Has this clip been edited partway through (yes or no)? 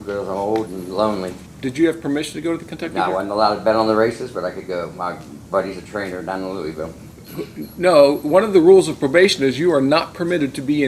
yes